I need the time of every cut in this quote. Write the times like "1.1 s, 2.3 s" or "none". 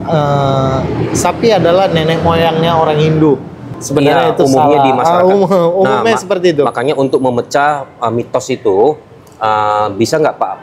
none